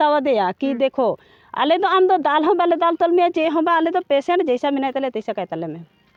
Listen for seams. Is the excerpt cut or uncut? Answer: uncut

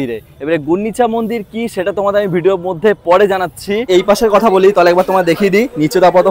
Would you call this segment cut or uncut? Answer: cut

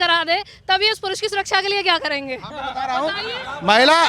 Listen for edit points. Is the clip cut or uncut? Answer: uncut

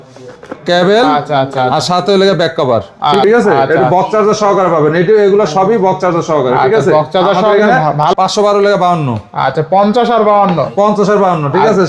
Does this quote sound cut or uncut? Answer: cut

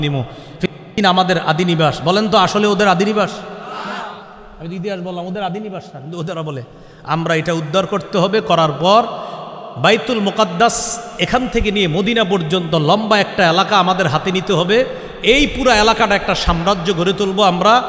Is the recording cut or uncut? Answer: uncut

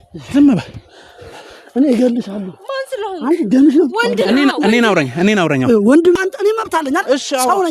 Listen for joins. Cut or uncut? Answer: cut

